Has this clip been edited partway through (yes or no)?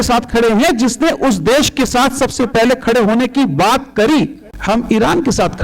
yes